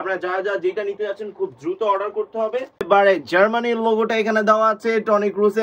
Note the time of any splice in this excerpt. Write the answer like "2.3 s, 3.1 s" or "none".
2.8 s